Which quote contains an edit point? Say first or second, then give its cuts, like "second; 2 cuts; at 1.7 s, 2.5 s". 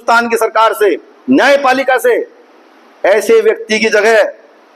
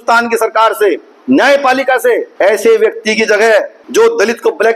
second; 2 cuts; at 2.3 s, 3.8 s